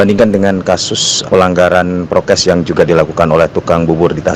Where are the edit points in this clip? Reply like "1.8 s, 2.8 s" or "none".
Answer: 1.3 s